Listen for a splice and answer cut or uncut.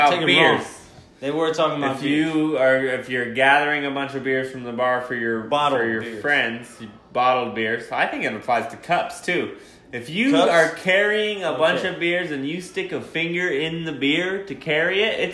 uncut